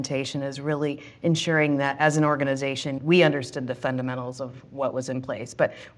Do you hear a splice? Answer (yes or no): no